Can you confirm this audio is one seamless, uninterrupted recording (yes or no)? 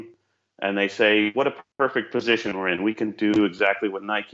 yes